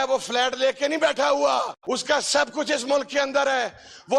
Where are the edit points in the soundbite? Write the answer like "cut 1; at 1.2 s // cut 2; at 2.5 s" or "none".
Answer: cut 1; at 1.8 s